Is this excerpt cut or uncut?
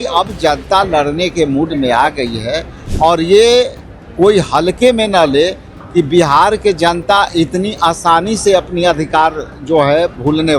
cut